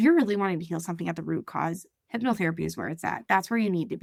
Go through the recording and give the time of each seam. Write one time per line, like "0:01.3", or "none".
none